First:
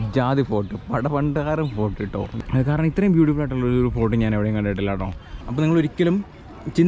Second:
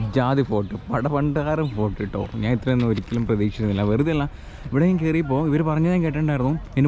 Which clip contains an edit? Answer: first; 2 cuts; at 2.3 s, 5.4 s

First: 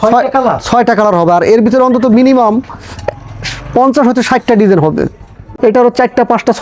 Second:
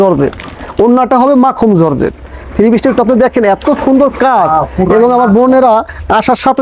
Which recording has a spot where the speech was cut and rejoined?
first; 1 cut; at 5.5 s

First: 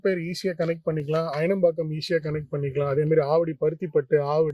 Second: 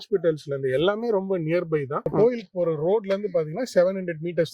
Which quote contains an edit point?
second; 1 cut; at 2.1 s

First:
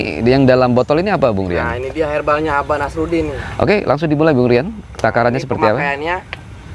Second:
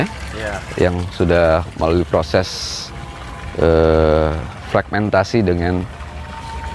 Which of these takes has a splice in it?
first; 1 cut; at 3.4 s

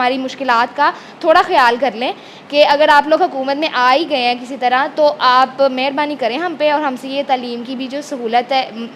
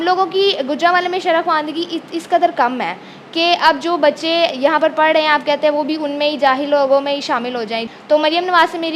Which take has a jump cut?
second; 1 cut; at 7.8 s

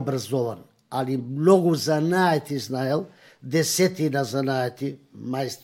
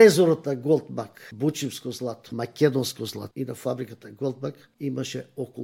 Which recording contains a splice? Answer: second; 4 cuts; at 1.2 s, 2.2 s, 3.2 s, 4.7 s

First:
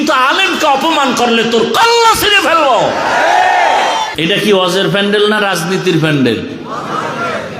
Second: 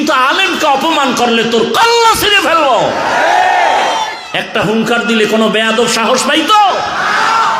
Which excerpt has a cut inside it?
first; 1 cut; at 4.1 s

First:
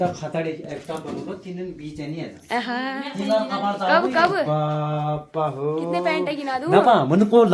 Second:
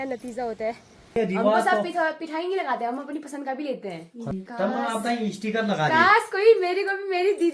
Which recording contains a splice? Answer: second; 2 cuts; at 1.2 s, 4.3 s

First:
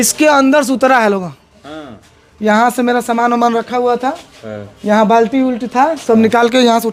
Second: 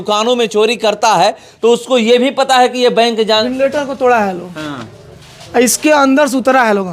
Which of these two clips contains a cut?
second; 1 cut; at 3.4 s

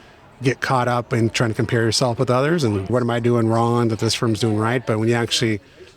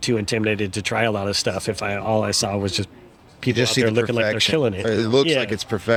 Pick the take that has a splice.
first; 1 cut; at 2.9 s

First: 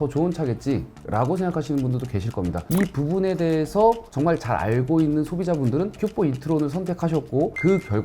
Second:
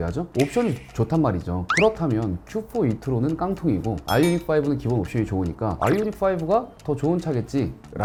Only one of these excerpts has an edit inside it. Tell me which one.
first; 1 cut; at 2.6 s

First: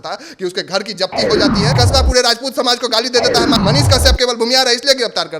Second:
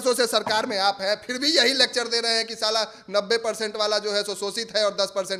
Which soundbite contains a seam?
first; 2 cuts; at 1.7 s, 3.5 s

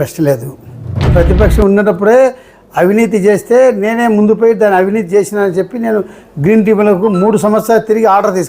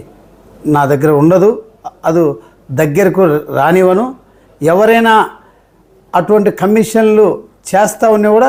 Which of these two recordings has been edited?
first; 1 cut; at 1.1 s

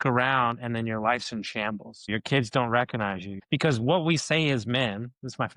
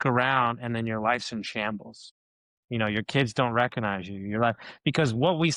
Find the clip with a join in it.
first; 2 cuts; at 2.1 s, 3.3 s

